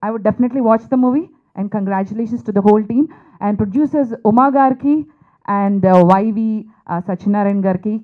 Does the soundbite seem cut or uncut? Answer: uncut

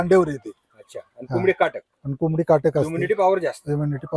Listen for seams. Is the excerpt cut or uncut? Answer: uncut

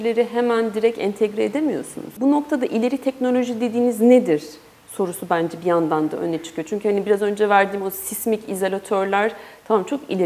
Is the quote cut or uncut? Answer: cut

